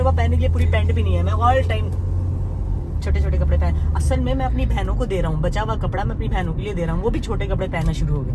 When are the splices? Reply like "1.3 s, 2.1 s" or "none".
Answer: none